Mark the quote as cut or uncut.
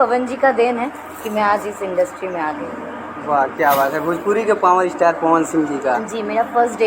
uncut